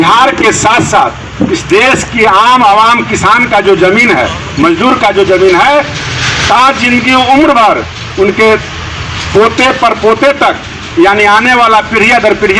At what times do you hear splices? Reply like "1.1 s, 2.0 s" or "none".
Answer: none